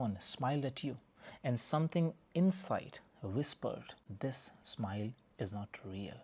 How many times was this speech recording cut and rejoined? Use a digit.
1